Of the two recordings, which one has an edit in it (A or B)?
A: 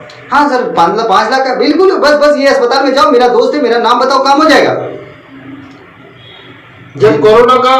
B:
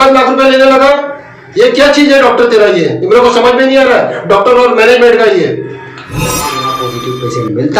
B